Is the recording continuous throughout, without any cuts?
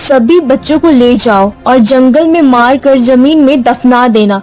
yes; 0 cuts

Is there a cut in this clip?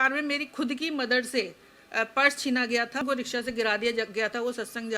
yes; 1 cut; at 3.0 s

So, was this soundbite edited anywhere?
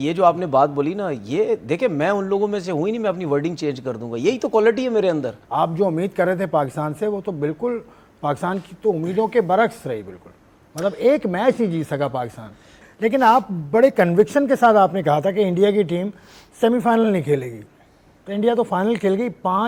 no; 0 cuts

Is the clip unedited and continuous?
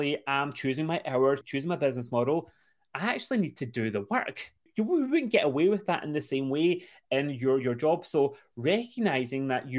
no; 2 cuts; at 1.5 s, 4.6 s

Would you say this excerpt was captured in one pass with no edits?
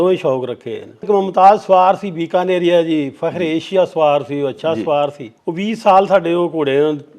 no; 2 cuts; at 1.1 s, 5.3 s

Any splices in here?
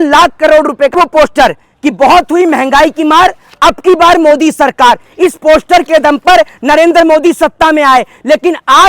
yes; 1 cut; at 1.0 s

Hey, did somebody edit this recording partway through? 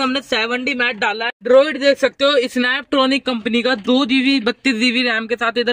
yes; 1 cut; at 1.4 s

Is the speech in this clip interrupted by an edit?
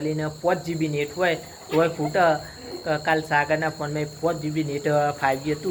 no; 0 cuts

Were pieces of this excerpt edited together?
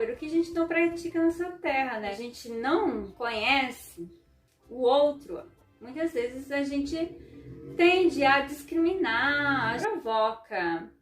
yes; 2 cuts; at 2.1 s, 9.8 s

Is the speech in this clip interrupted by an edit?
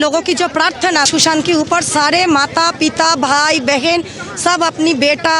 yes; 1 cut; at 1.1 s

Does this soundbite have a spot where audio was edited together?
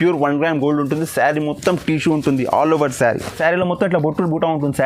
yes; 1 cut; at 3.3 s

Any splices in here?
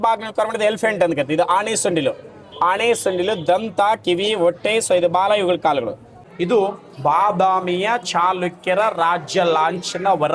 yes; 1 cut; at 6.2 s

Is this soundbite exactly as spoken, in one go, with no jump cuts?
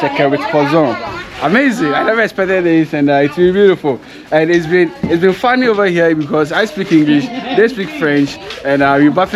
yes; 0 cuts

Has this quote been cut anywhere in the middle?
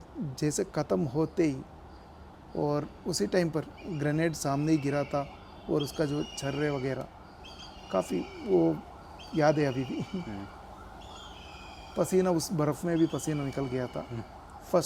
no; 0 cuts

